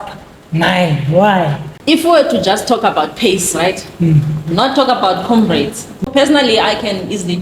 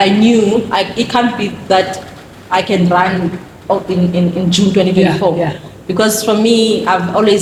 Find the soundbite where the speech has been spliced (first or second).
first